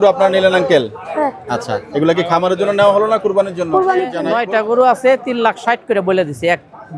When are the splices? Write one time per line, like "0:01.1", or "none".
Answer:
0:04.2

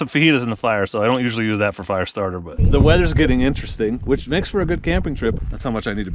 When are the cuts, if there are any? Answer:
0:02.5
0:05.4

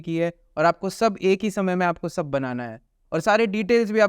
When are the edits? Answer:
0:03.0

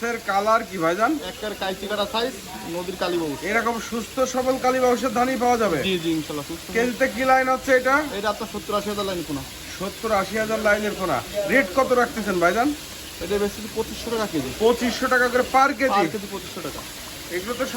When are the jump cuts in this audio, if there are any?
none

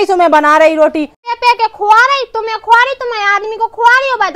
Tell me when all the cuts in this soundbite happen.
0:01.3

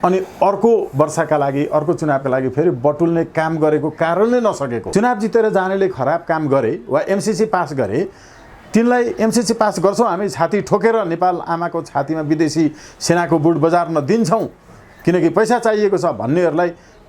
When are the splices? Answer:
0:04.8

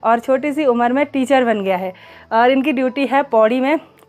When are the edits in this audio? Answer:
none

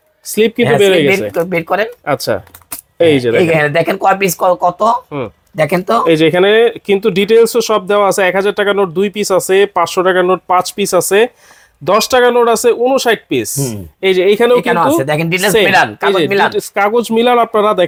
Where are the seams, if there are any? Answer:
none

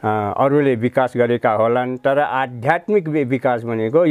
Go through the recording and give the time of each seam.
none

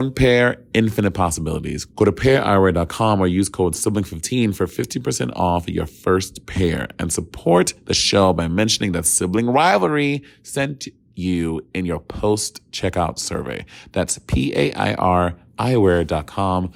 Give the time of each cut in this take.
none

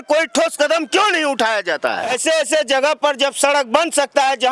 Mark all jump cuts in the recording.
0:02.1

